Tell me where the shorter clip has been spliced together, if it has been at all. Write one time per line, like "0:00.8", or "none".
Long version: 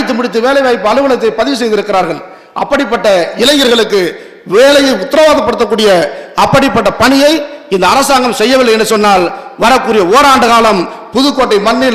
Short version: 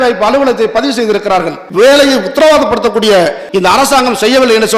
0:01.6
0:03.4